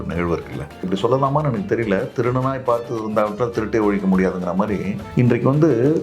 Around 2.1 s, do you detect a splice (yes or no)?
no